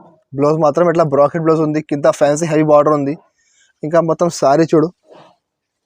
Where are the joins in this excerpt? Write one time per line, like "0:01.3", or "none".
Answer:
none

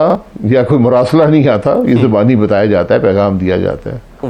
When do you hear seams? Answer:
none

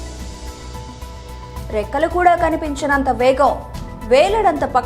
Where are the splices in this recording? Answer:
0:01.6

